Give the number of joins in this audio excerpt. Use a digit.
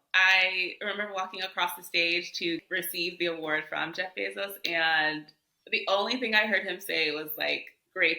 1